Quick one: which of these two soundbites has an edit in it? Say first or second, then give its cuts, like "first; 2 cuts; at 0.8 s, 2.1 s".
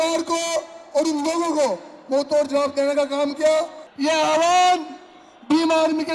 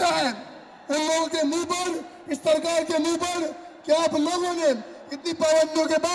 first; 1 cut; at 3.8 s